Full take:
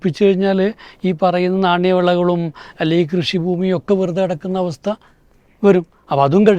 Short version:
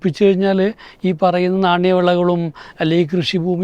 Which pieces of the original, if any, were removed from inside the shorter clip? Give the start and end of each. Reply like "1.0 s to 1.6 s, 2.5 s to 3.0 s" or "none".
none